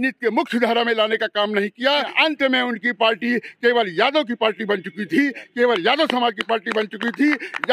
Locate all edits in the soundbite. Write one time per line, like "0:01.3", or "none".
0:02.1